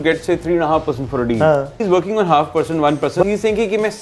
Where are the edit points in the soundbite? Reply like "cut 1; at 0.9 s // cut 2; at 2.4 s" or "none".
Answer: cut 1; at 1.8 s // cut 2; at 3.2 s